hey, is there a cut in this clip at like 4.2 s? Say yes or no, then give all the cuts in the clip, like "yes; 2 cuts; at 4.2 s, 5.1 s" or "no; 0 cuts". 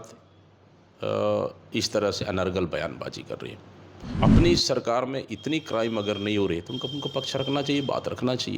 yes; 1 cut; at 4.2 s